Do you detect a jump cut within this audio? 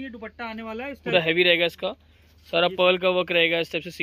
yes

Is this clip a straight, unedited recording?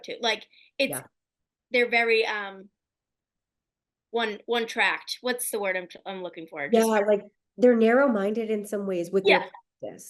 yes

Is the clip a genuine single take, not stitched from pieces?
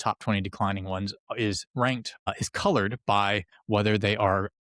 no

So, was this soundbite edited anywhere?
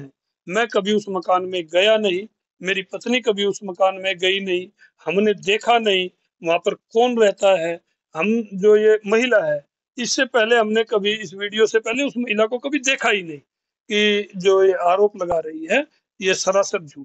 no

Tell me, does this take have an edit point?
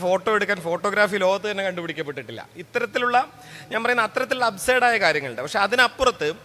no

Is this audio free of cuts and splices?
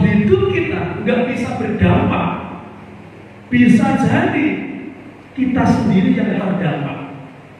no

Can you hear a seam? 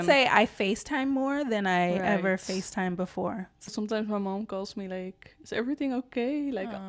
yes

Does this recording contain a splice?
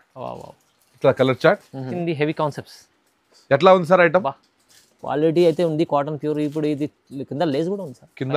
yes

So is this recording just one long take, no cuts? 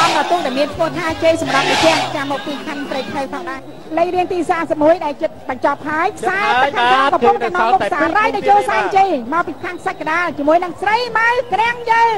no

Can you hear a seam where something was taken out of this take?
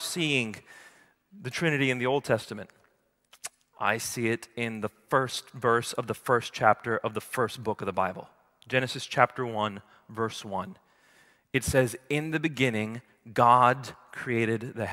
no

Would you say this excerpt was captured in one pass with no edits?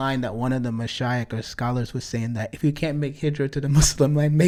yes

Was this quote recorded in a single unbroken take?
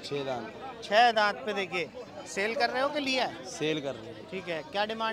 yes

